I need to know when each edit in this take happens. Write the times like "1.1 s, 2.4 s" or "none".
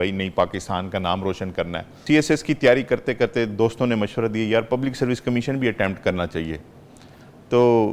2.0 s